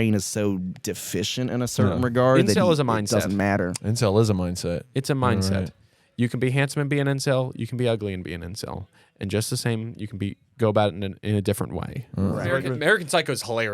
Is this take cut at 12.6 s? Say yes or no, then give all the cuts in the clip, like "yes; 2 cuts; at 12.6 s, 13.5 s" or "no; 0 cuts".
yes; 1 cut; at 12.6 s